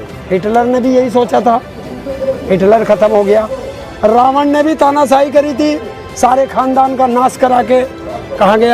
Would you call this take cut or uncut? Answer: uncut